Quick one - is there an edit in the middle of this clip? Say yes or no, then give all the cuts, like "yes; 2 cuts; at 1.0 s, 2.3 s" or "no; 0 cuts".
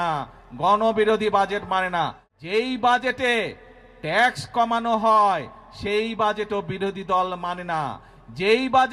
yes; 1 cut; at 2.2 s